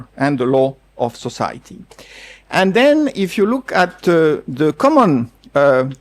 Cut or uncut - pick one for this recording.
uncut